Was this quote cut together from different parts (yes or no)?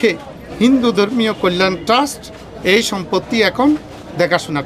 no